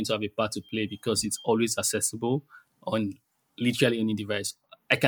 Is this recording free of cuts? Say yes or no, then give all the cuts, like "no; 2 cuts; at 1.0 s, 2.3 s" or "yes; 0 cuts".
yes; 0 cuts